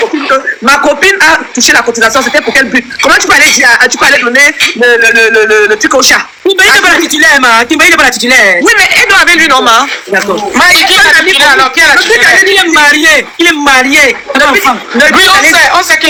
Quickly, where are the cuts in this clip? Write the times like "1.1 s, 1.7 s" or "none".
none